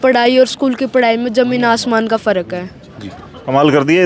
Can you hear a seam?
no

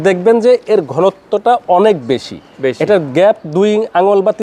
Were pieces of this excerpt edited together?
no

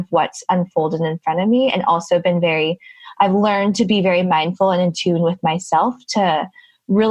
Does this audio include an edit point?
no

